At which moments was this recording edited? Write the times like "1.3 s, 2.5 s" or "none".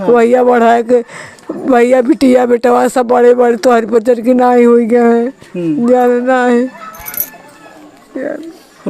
none